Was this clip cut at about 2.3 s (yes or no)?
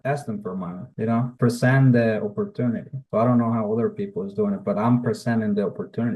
no